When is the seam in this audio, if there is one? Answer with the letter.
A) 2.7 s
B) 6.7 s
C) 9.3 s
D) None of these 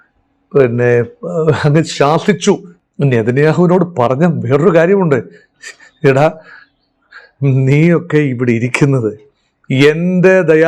A